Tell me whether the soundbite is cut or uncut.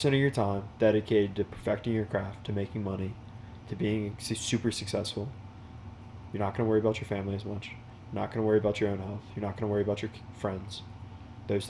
uncut